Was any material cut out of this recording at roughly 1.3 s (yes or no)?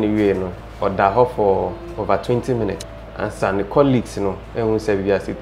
no